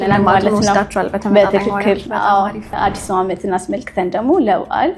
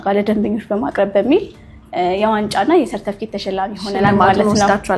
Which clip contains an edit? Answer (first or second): first